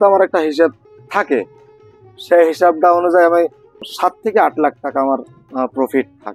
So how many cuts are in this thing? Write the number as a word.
two